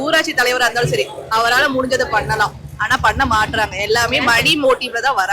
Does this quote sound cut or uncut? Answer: uncut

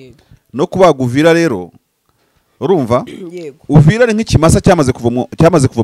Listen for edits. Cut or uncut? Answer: uncut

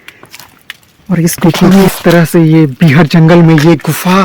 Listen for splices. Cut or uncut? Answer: cut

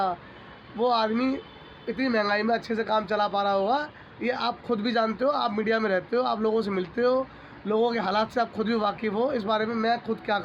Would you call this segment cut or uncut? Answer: uncut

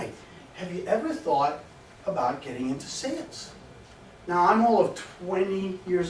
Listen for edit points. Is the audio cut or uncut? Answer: uncut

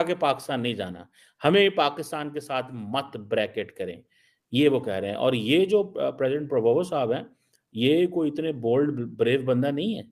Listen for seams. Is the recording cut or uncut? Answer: uncut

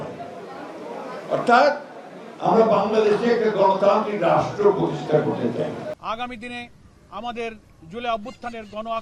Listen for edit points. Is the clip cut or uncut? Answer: cut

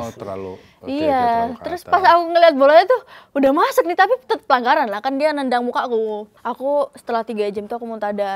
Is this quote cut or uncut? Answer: cut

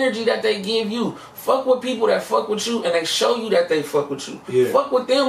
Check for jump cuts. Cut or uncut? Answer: uncut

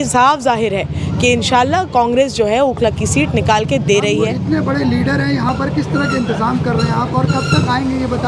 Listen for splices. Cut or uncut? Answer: uncut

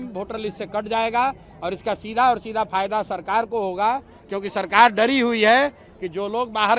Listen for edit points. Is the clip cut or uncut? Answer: uncut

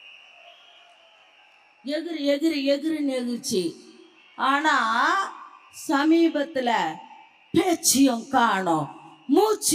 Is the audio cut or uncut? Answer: uncut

